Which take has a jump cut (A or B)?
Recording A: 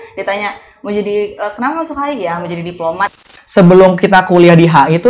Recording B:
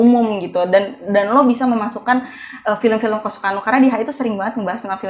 A